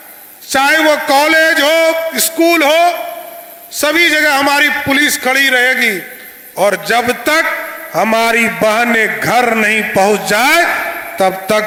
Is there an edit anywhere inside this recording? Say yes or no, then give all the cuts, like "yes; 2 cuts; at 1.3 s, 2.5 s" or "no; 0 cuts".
no; 0 cuts